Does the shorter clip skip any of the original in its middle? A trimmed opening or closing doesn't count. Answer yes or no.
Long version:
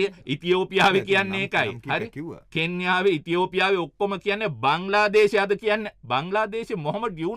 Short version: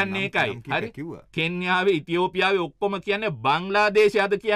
no